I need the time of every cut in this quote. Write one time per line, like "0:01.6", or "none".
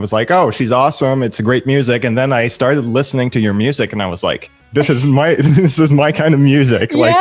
0:04.5